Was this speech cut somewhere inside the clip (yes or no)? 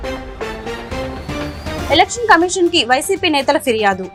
no